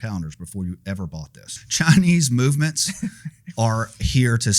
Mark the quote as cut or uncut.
cut